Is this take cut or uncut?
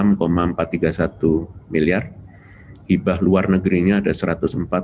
uncut